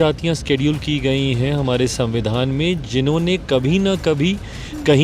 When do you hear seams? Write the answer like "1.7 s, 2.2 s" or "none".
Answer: none